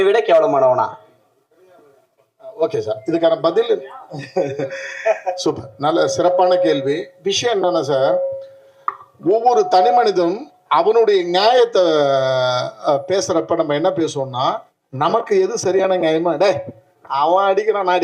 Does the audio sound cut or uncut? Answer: uncut